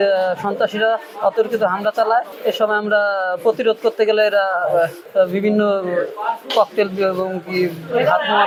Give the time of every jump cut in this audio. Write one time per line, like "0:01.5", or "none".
none